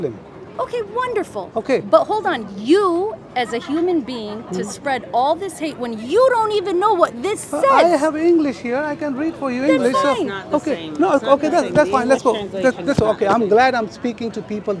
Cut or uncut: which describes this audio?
uncut